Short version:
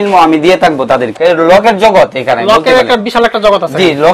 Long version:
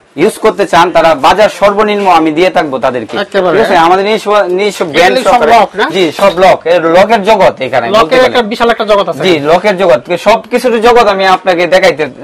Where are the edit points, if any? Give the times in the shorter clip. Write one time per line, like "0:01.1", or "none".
0:01.2